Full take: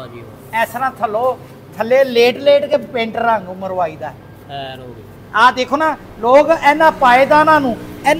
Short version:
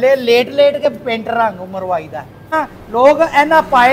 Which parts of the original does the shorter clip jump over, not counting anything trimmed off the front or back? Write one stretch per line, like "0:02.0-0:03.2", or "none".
0:04.4-0:05.8